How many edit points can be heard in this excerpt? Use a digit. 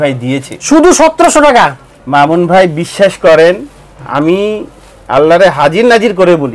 0